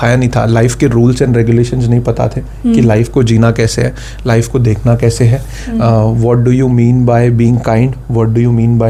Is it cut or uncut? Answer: uncut